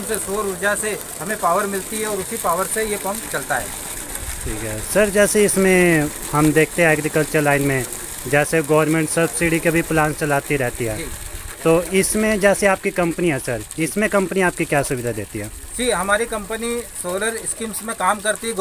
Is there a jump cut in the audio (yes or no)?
no